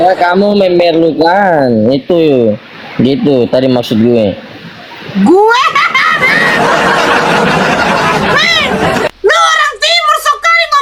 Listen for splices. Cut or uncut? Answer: uncut